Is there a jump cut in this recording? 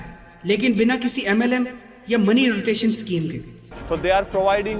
yes; 1 cut; at 3.7 s

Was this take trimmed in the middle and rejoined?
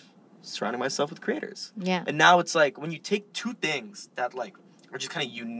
no; 0 cuts

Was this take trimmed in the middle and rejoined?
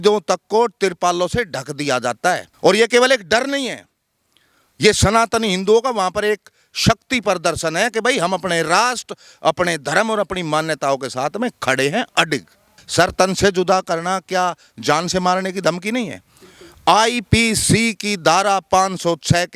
yes; 2 cuts; at 2.5 s, 12.8 s

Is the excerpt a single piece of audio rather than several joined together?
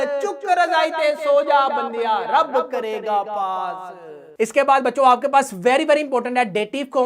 yes; 0 cuts

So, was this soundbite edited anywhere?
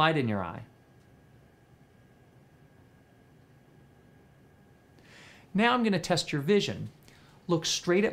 no; 0 cuts

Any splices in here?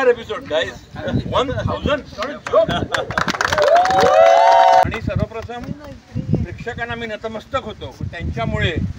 yes; 1 cut; at 4.8 s

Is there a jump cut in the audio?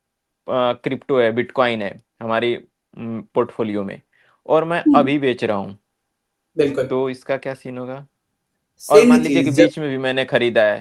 no; 0 cuts

